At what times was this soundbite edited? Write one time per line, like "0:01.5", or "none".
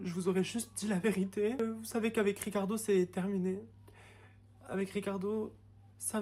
0:01.6